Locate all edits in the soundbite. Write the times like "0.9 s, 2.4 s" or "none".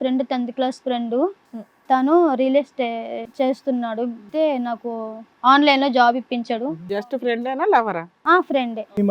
3.2 s, 4.3 s, 6.9 s